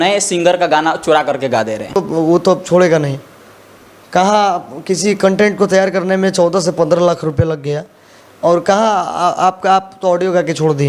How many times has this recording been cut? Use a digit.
1